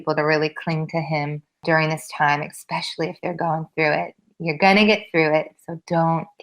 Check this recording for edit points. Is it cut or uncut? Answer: cut